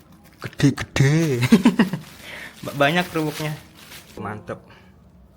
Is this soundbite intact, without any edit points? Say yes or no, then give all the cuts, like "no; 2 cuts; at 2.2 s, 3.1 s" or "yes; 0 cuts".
no; 1 cut; at 4.2 s